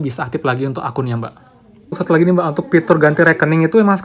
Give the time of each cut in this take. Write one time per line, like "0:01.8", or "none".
0:02.0